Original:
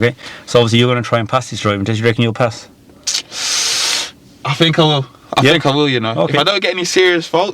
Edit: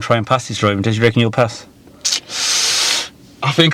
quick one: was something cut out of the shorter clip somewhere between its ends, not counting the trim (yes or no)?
no